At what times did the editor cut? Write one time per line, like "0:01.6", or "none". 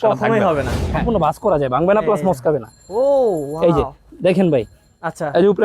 0:01.0